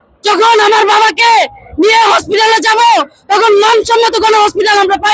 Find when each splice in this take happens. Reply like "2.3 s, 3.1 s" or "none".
none